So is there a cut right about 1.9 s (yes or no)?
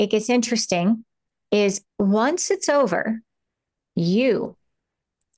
yes